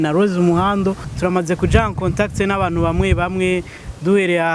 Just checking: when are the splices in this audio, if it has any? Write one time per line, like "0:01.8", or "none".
0:01.1